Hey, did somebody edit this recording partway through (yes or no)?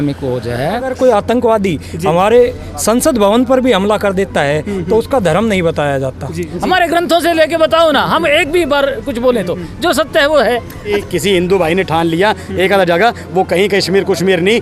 yes